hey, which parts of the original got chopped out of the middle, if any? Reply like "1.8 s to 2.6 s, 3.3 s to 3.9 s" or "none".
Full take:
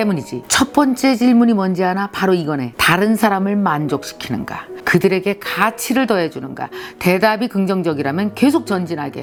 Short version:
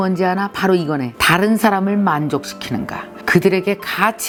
none